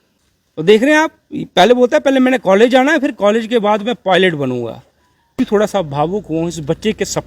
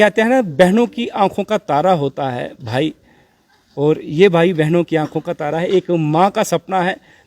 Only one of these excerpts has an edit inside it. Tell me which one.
first; 1 cut; at 5.4 s

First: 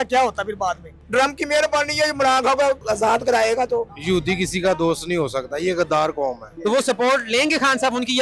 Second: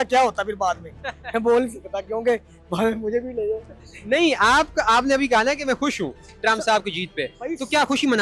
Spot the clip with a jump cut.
first; 4 cuts; at 0.9 s, 2.8 s, 3.9 s, 6.5 s

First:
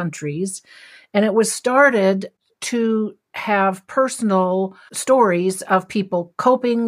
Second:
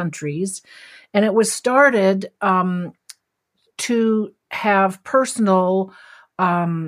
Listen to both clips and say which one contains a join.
first; 2 cuts; at 2.3 s, 4.9 s

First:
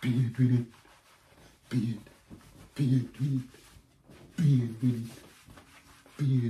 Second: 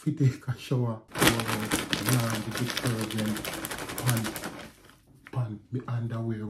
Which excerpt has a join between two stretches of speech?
second; 1 cut; at 1.1 s

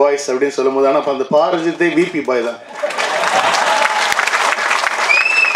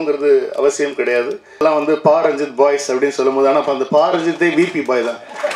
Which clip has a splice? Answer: second; 1 cut; at 1.6 s

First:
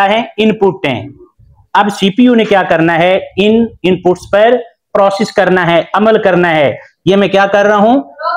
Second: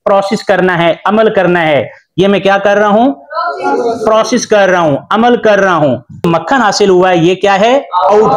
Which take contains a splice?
second; 1 cut; at 6.3 s

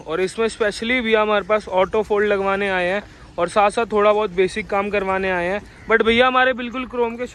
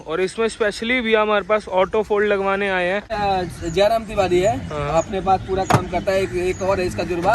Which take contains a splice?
second; 1 cut; at 3.1 s

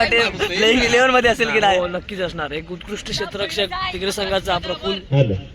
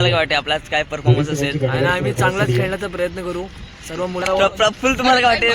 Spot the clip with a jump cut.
second; 1 cut; at 4.2 s

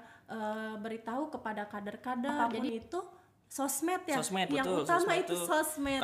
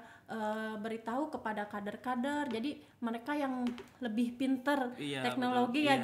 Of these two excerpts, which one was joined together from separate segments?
first; 1 cut; at 2.4 s

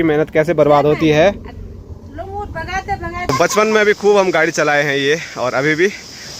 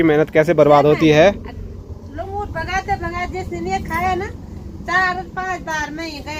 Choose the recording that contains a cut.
first; 1 cut; at 3.3 s

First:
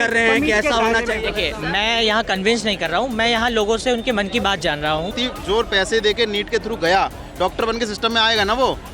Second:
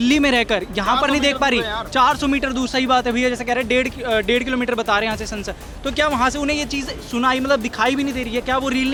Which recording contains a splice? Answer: first; 1 cut; at 5.1 s

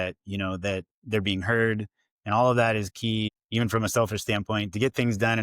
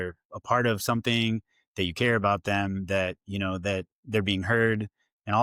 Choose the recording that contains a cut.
first; 1 cut; at 3.4 s

